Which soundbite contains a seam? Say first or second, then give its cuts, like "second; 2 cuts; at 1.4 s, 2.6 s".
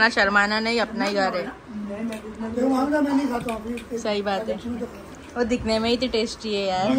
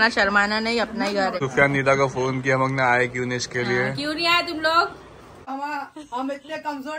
second; 2 cuts; at 1.4 s, 5.5 s